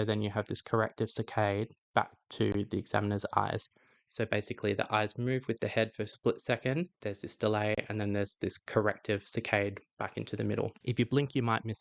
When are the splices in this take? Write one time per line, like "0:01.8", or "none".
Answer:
0:06.9
0:10.8